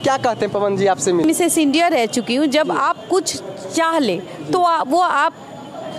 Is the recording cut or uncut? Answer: cut